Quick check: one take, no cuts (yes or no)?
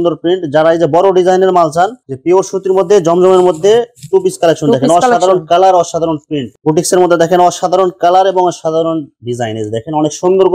no